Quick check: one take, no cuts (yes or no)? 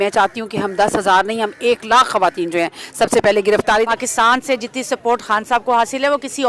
no